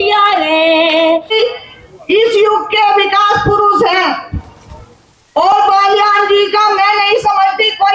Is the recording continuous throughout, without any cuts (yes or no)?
no